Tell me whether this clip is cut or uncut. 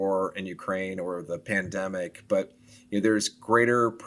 uncut